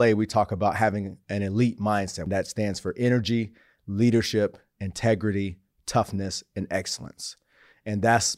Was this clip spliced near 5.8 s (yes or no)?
no